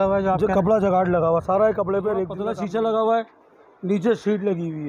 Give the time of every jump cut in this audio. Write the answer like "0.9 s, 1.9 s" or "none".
2.4 s